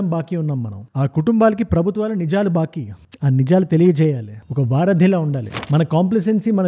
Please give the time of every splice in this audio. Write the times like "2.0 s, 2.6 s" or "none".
5.5 s